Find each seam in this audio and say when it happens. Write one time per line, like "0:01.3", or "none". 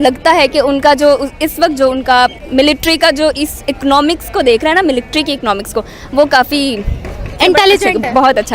0:02.4
0:07.4